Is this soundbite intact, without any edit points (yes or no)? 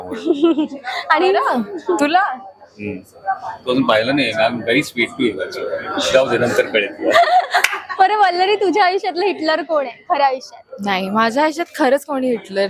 yes